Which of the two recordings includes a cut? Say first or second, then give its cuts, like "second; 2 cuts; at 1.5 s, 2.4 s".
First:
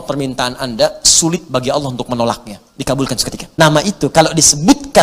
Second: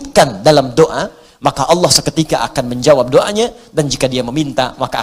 first; 1 cut; at 3.4 s